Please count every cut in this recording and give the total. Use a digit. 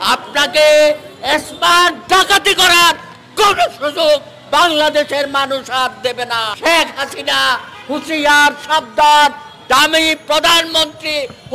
1